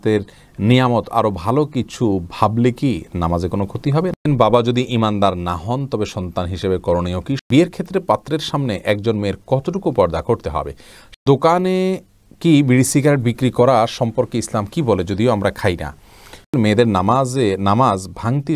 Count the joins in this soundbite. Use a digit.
4